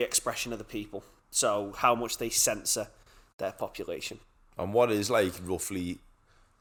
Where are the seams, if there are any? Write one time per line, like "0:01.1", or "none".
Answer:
none